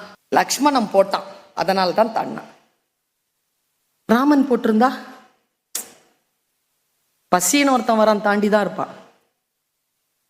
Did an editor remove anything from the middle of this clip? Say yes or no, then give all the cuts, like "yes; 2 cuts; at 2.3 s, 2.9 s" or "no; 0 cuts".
no; 0 cuts